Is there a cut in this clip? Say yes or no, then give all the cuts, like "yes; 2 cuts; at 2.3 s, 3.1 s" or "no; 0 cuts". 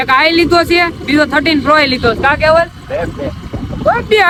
no; 0 cuts